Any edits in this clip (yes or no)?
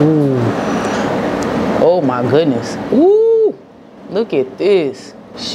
no